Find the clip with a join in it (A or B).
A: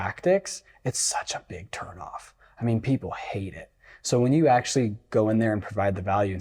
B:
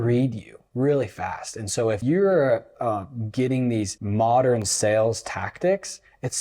B